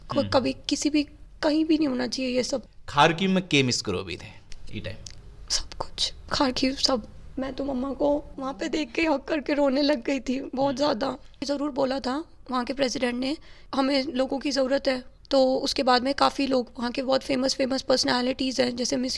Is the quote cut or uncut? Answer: cut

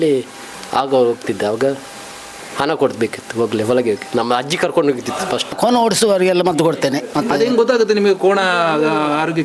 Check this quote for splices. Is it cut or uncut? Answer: cut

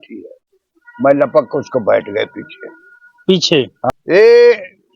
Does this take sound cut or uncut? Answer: cut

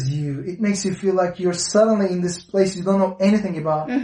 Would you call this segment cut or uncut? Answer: uncut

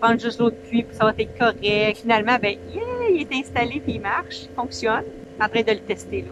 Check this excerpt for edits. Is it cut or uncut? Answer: cut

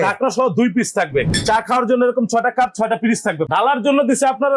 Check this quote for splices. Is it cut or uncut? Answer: cut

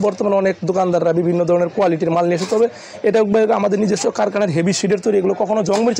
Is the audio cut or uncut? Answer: uncut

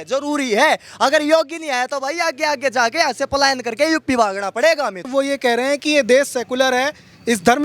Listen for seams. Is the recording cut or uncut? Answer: cut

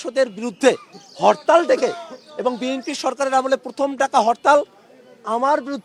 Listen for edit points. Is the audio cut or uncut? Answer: uncut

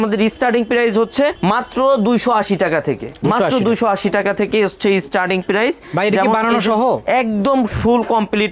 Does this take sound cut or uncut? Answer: uncut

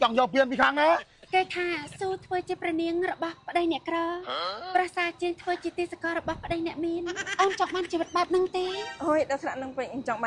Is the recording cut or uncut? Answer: cut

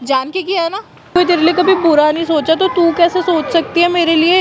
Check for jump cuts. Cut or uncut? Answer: cut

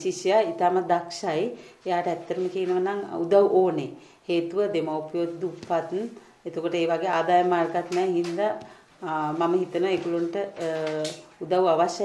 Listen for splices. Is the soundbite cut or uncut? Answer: uncut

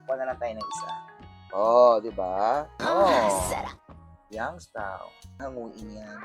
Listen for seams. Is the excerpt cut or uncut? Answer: cut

